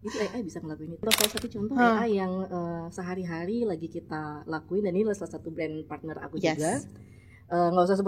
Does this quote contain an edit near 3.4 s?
no; 1 cut; at 1.0 s

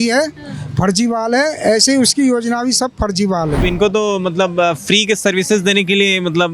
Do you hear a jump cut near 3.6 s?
yes; 1 cut; at 3.6 s

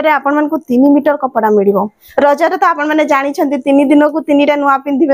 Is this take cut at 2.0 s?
yes; 1 cut; at 2.0 s

